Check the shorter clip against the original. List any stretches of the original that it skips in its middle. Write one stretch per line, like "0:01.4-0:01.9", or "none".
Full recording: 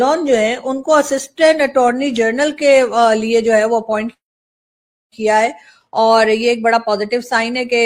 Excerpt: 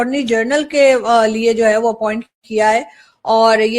0:04.2-0:05.0